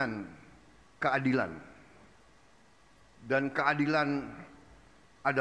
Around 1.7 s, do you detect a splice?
no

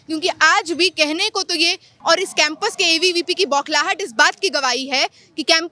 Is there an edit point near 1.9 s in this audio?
yes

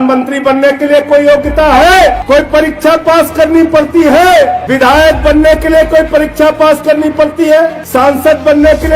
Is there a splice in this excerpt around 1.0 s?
no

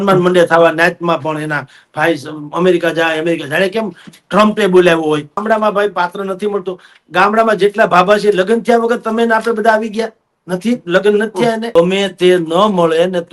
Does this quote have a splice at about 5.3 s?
yes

